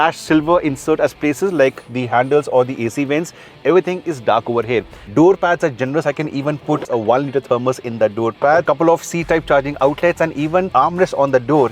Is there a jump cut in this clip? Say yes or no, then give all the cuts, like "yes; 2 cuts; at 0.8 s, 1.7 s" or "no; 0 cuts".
yes; 4 cuts; at 5.0 s, 6.9 s, 8.6 s, 10.7 s